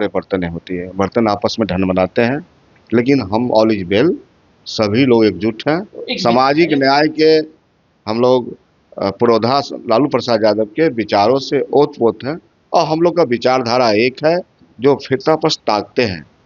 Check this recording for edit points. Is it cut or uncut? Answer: uncut